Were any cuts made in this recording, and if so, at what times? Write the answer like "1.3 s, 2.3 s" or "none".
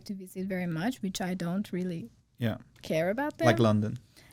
none